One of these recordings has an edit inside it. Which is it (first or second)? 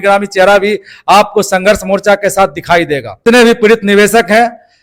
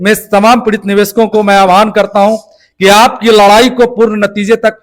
first